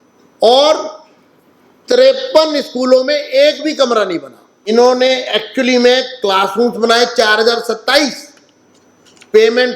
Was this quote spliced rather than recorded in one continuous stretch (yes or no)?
yes